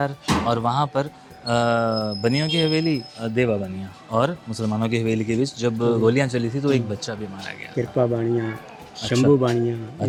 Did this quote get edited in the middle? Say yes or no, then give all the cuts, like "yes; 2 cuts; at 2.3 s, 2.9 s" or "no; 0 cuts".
no; 0 cuts